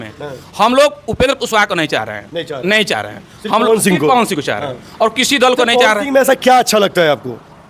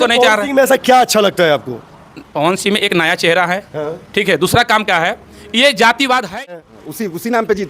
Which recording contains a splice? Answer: second; 1 cut; at 6.8 s

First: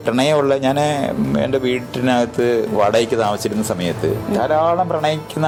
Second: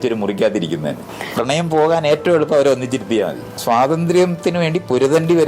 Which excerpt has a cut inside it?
second; 2 cuts; at 1.0 s, 3.6 s

